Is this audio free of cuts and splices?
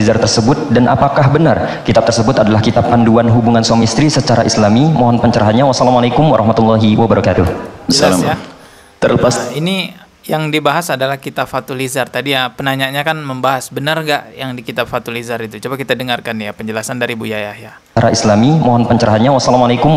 yes; 0 cuts

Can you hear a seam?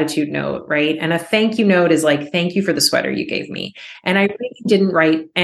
no; 0 cuts

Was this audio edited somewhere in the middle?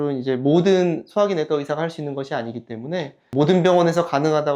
no; 0 cuts

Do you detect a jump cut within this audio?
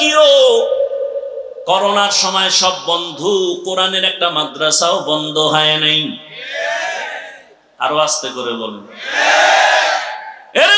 no; 0 cuts

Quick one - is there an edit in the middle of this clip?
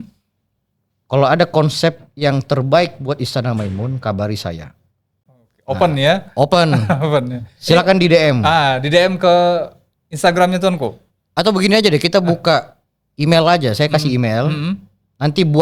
no; 0 cuts

